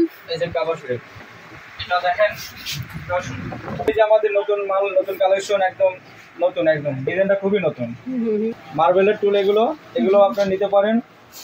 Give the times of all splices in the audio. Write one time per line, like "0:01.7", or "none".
0:03.9
0:08.6